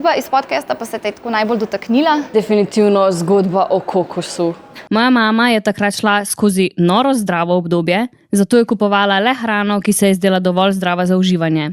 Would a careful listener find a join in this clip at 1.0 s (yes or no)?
no